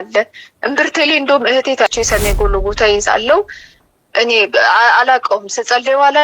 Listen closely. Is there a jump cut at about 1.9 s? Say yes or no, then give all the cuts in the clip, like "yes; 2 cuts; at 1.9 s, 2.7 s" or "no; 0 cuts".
yes; 1 cut; at 1.9 s